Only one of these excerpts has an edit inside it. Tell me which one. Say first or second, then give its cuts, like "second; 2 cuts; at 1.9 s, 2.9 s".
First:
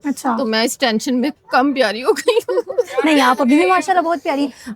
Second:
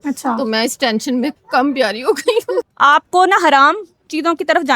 second; 1 cut; at 2.7 s